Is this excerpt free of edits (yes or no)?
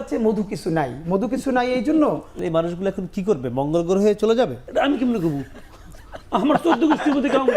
no